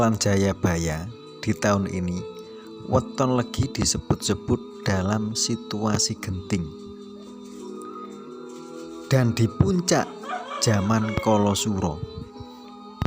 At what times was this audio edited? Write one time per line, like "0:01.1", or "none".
0:06.7
0:08.9